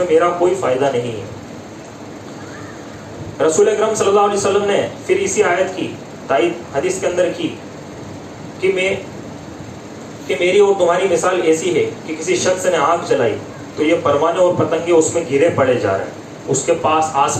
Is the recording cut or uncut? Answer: uncut